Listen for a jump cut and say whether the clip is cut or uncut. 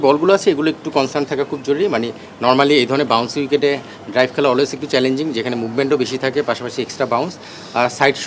uncut